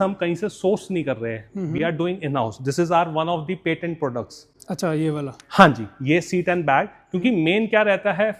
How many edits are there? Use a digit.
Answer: 0